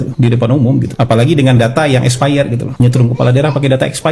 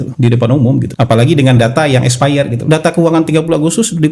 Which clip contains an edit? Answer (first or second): second